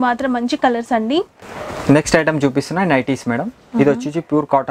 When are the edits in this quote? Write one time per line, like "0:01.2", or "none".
0:01.3

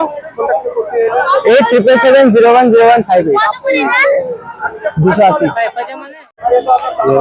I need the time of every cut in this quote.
none

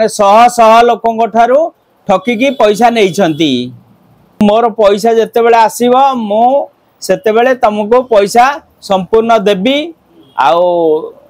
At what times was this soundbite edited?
0:04.4

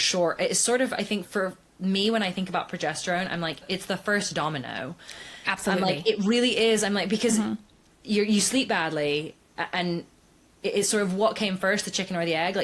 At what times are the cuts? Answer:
0:01.3
0:03.6

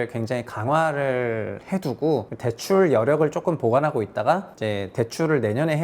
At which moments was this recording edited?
0:02.3
0:04.5

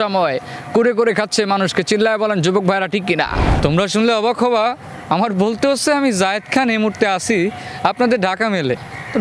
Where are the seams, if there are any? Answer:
0:03.4

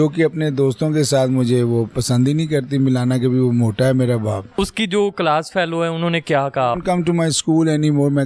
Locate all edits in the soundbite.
0:04.6
0:06.7

